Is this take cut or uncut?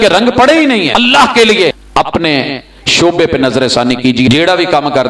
cut